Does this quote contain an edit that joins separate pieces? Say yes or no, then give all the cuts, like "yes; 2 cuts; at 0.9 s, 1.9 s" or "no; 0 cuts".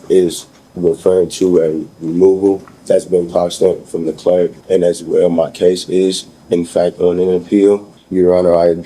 yes; 3 cuts; at 2.7 s, 4.6 s, 8.0 s